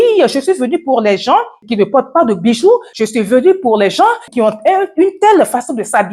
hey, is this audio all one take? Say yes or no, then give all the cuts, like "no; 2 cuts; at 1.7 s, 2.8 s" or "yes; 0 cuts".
no; 3 cuts; at 1.6 s, 2.9 s, 4.3 s